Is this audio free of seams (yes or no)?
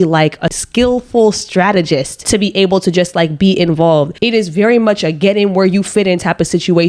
yes